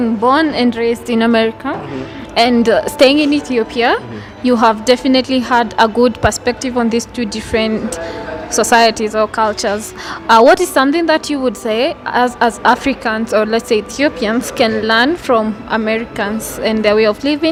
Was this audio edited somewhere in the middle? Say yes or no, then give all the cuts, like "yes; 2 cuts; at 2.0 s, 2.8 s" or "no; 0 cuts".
no; 0 cuts